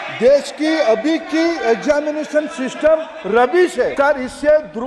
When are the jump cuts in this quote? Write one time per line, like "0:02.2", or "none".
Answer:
0:03.9